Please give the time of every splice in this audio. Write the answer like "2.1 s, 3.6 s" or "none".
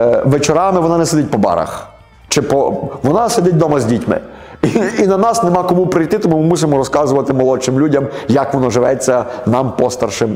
none